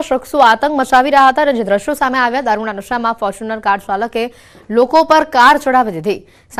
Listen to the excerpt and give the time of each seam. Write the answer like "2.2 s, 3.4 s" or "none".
none